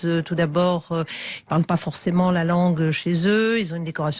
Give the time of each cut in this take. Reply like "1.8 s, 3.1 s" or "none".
3.2 s